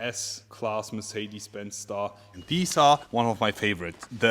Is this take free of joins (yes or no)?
no